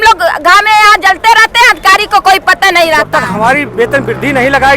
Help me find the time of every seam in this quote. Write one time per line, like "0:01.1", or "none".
0:03.1